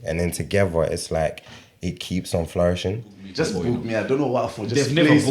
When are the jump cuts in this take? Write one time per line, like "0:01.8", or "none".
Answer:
0:03.2